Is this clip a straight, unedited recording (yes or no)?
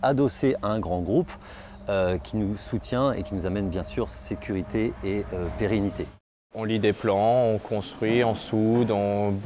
no